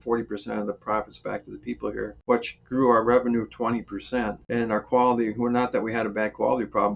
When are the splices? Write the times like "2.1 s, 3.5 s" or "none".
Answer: 2.2 s, 4.4 s

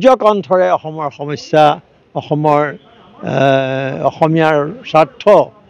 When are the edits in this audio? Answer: none

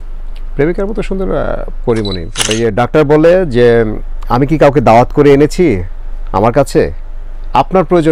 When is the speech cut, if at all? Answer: 2.5 s

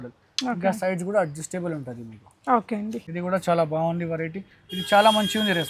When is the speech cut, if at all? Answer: 3.1 s

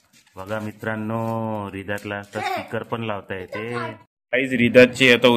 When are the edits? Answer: 4.2 s

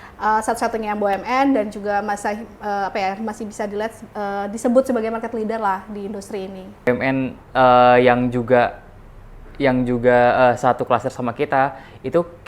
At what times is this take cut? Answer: 6.9 s

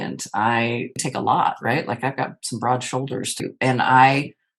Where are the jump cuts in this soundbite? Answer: 1.0 s, 3.4 s

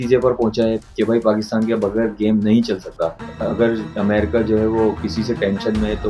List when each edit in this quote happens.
3.3 s

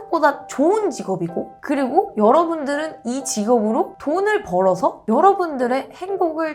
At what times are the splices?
none

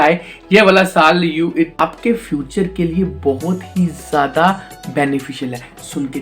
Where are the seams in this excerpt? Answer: 1.7 s

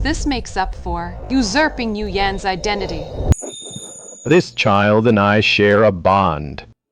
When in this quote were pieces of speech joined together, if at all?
3.4 s

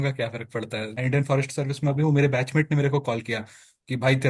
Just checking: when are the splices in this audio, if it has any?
1.0 s

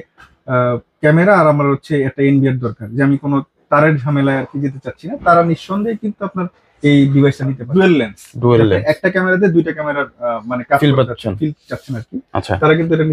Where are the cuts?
7.6 s

